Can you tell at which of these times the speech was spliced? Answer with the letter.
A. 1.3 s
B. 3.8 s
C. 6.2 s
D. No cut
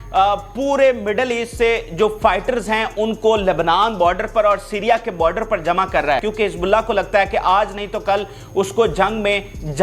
C